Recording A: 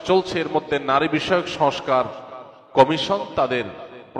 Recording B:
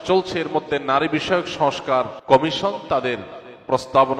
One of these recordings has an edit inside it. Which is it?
B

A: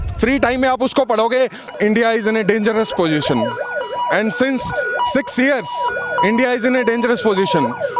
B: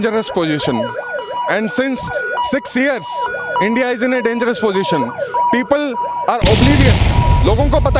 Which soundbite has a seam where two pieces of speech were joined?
A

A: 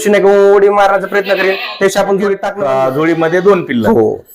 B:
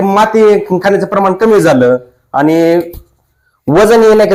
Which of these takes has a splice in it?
A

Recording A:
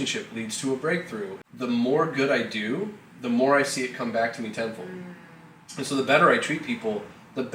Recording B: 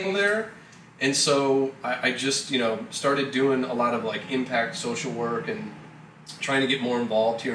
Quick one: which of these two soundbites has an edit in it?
A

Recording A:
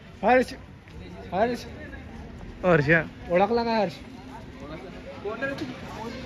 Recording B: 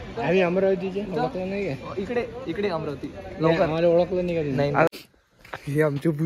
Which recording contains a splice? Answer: B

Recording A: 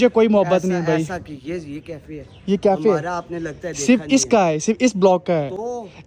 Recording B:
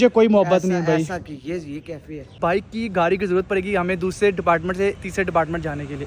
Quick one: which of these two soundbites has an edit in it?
B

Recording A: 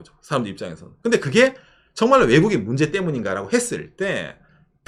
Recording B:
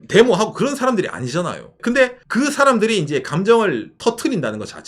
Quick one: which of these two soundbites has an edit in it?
B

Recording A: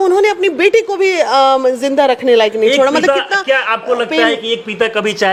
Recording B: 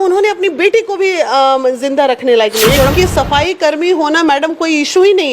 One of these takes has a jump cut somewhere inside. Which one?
B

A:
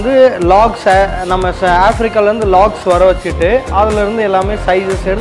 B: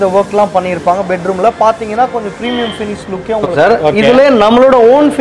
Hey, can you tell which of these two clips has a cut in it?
B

